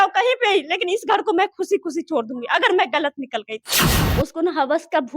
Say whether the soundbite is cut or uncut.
cut